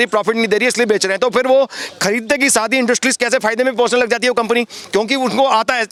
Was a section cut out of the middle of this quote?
no; 0 cuts

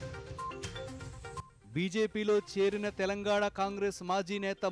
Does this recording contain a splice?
yes; 1 cut; at 1.4 s

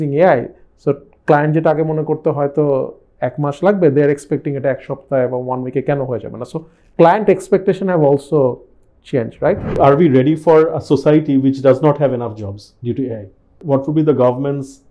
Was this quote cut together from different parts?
yes; 2 cuts; at 9.8 s, 13.6 s

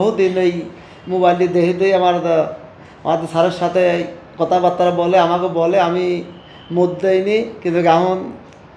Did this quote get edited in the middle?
no; 0 cuts

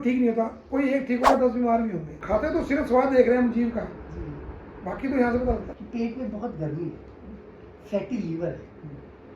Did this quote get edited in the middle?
yes; 2 cuts; at 2.1 s, 5.7 s

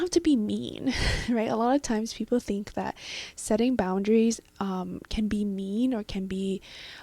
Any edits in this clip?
no; 0 cuts

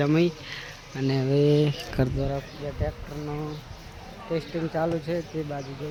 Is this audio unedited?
yes; 0 cuts

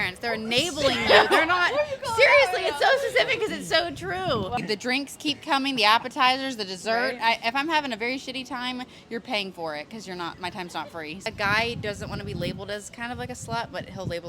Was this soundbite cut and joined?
yes; 2 cuts; at 4.6 s, 11.2 s

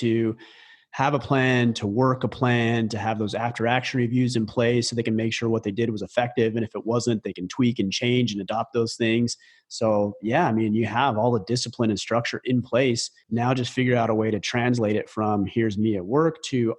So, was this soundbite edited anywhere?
yes; 1 cut; at 13.1 s

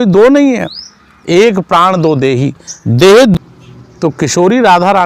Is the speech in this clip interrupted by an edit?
yes; 1 cut; at 3.4 s

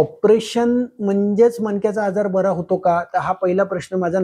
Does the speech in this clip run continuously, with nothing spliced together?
yes; 0 cuts

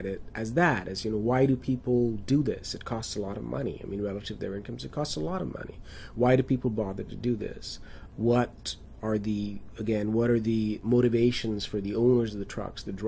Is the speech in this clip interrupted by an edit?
no; 0 cuts

